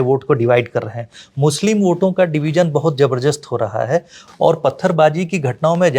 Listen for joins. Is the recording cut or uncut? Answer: cut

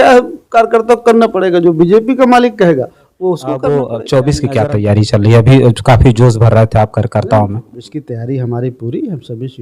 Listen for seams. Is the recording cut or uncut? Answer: cut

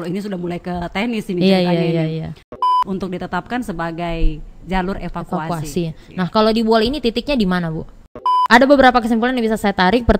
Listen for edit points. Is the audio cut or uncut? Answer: cut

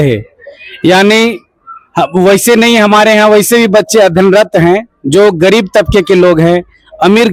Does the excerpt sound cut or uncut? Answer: uncut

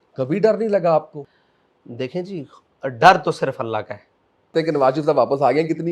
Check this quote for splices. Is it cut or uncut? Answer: cut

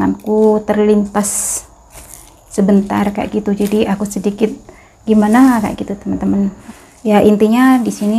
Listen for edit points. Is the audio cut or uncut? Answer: cut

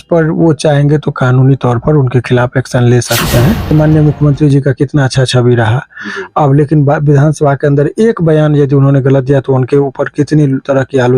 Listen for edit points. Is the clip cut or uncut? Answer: cut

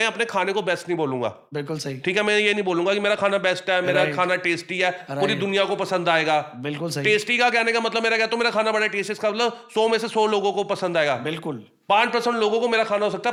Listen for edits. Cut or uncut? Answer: uncut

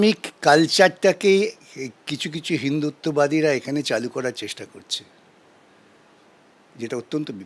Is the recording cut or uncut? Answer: uncut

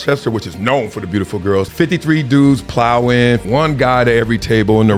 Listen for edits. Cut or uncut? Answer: cut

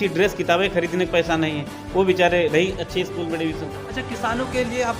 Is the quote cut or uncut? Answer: cut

